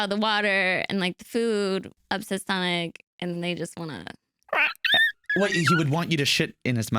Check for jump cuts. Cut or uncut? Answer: cut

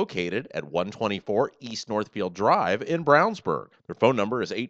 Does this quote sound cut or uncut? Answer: uncut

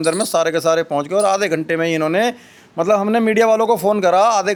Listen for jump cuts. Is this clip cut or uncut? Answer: uncut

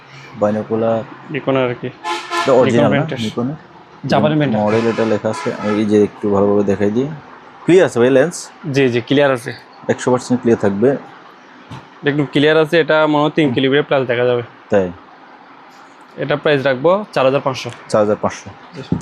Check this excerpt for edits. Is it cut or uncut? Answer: uncut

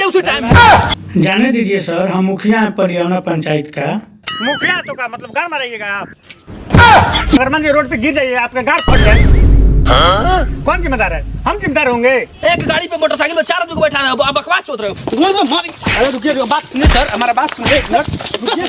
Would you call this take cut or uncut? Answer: cut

